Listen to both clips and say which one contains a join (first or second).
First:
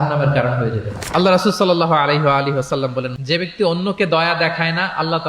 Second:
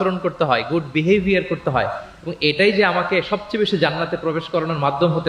first